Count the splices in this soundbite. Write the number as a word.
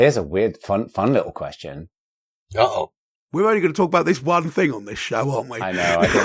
zero